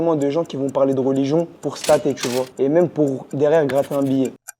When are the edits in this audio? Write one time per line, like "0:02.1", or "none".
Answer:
0:01.6
0:02.5
0:03.2